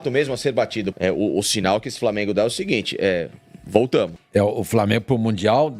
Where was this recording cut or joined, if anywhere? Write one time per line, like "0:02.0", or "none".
0:00.9
0:04.2

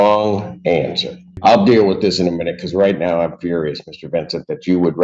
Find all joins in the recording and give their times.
0:01.4

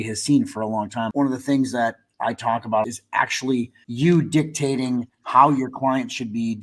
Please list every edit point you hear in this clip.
0:01.1
0:02.8
0:03.8

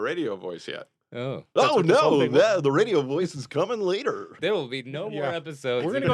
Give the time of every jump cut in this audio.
0:01.5
0:04.4

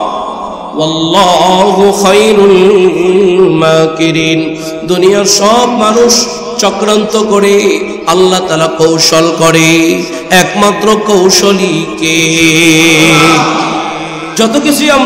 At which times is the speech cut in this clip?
none

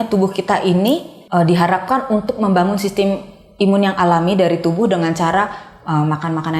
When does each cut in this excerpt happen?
0:01.1

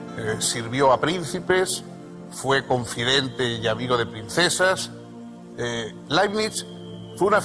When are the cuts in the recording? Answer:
0:01.9

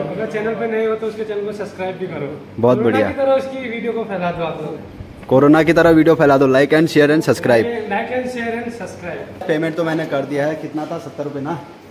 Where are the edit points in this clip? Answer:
0:09.4

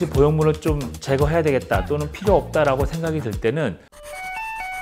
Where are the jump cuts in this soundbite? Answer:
0:00.9
0:03.9

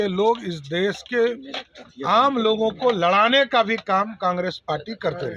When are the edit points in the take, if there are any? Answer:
none

